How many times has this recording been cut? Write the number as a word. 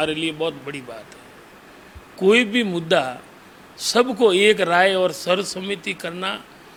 zero